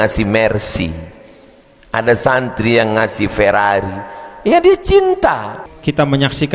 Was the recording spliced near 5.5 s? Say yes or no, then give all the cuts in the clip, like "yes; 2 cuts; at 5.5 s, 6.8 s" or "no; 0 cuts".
yes; 1 cut; at 5.5 s